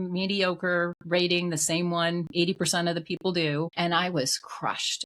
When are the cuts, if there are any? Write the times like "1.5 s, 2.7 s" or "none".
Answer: 3.7 s